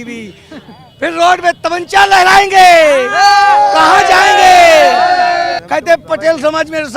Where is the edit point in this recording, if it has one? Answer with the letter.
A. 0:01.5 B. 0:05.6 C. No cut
B